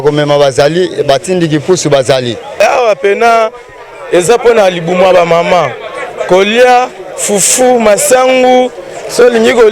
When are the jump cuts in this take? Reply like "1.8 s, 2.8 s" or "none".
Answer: 2.6 s